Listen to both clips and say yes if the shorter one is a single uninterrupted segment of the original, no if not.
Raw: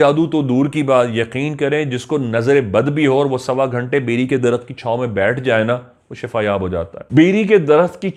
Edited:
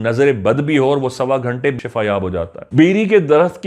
no